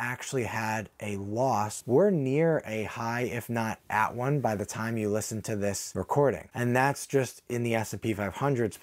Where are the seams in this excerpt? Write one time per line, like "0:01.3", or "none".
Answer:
0:01.8